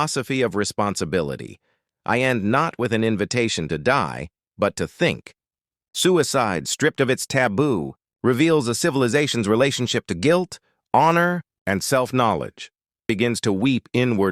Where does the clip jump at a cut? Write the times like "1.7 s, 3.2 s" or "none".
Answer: 13.1 s